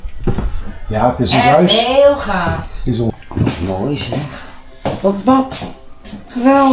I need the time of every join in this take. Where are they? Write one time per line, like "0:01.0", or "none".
0:03.1